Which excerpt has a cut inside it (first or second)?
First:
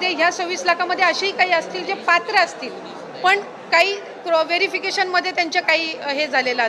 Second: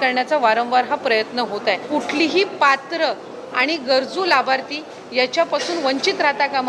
second